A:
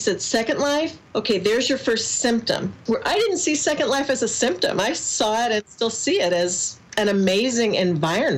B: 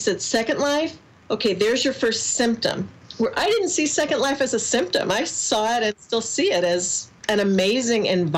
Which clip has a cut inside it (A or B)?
A